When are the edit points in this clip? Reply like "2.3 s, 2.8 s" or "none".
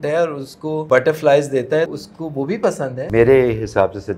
0.8 s, 1.9 s, 3.1 s

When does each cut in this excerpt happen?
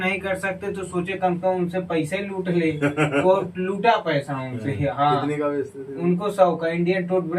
none

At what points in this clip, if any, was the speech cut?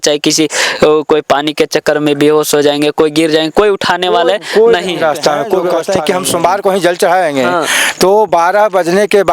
5.5 s

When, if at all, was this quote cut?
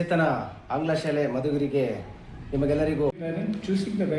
3.2 s

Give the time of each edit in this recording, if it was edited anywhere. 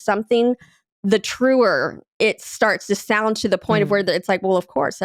none

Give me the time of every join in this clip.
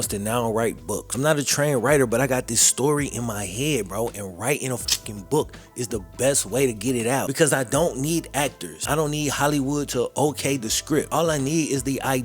1.0 s, 7.3 s, 11.1 s

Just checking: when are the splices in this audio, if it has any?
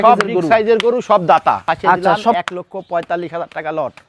2.4 s

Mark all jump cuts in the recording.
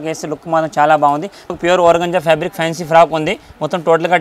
1.5 s

